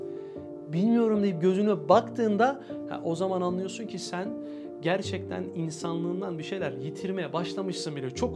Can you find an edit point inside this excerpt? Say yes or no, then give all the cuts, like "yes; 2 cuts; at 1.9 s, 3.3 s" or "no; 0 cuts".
no; 0 cuts